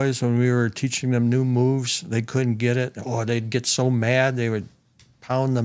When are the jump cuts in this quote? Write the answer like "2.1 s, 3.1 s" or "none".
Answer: none